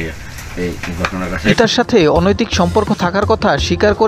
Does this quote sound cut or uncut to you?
cut